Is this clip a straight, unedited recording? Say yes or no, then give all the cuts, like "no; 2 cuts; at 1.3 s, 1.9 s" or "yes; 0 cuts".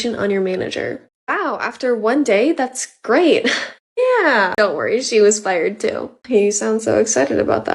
no; 1 cut; at 4.5 s